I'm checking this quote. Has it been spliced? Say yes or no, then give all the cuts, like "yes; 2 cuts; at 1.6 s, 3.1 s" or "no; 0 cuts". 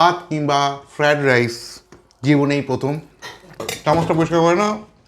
yes; 1 cut; at 3.7 s